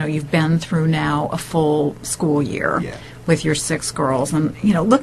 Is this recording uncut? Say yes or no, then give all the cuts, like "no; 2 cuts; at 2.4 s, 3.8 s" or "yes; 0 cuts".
no; 1 cut; at 3.7 s